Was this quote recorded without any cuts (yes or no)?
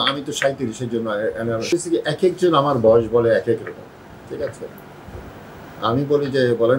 no